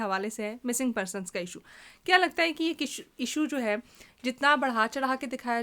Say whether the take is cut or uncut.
uncut